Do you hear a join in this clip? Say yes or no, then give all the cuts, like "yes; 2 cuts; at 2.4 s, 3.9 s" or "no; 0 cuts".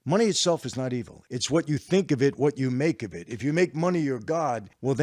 no; 0 cuts